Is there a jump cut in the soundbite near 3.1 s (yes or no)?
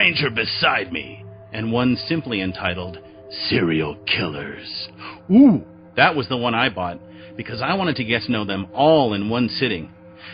yes